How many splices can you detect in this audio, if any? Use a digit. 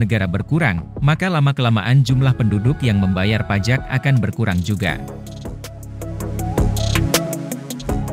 0